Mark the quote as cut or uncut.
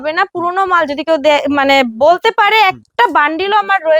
uncut